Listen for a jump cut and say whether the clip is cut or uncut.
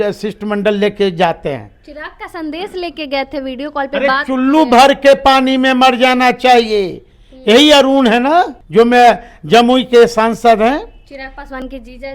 cut